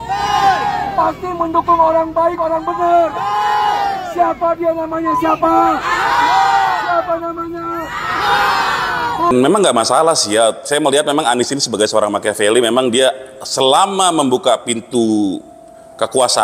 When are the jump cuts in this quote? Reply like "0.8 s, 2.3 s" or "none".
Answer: 9.3 s

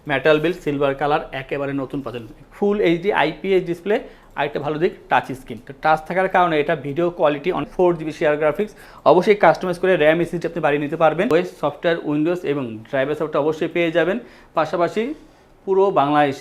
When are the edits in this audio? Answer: 2.4 s, 7.7 s, 11.3 s

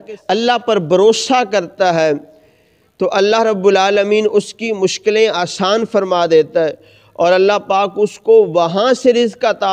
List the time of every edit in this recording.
none

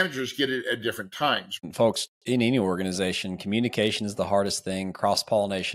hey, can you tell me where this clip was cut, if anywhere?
1.6 s

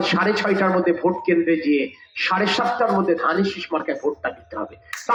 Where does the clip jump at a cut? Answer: none

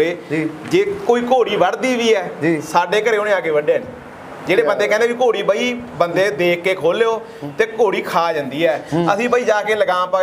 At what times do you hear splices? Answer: none

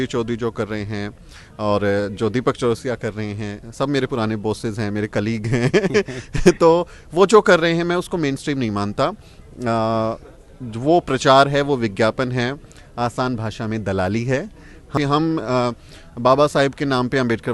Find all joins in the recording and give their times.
14.9 s

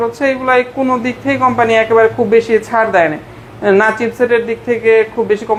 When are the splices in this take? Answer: none

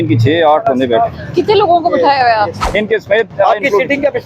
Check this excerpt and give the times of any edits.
2.6 s

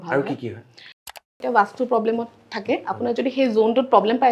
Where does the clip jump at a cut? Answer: 1.4 s

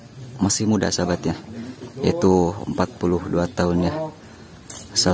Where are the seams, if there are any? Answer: none

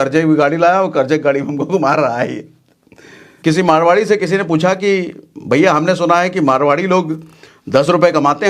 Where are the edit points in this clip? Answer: 3.3 s

